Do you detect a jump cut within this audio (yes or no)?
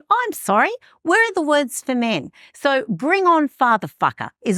no